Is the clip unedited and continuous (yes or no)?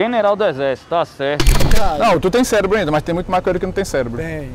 no